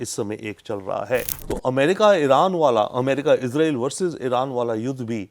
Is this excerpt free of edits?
no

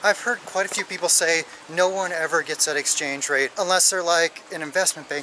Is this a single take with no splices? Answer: yes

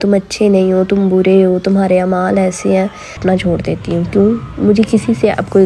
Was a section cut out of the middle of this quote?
yes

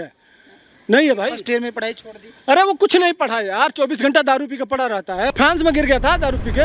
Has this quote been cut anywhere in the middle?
yes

